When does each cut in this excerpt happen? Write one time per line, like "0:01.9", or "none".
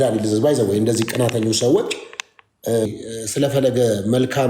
0:02.9